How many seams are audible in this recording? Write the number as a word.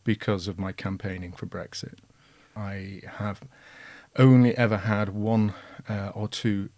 one